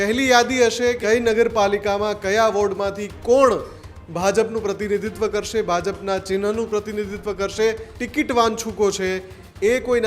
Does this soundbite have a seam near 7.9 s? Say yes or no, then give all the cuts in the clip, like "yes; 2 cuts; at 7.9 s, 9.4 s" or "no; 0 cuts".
yes; 2 cuts; at 1.0 s, 7.9 s